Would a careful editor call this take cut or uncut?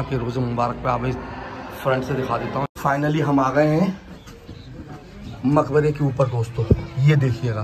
cut